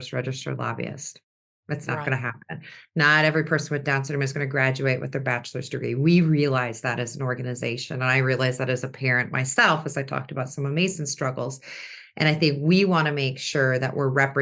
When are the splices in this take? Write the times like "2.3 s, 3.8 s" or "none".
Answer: none